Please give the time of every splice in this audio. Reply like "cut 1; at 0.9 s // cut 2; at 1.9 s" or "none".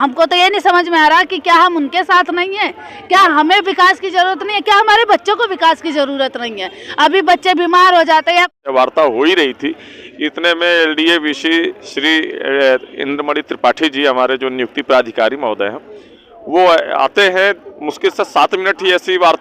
cut 1; at 8.6 s